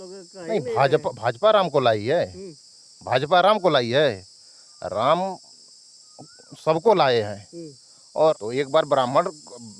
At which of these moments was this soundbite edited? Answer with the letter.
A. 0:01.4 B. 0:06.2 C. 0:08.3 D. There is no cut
C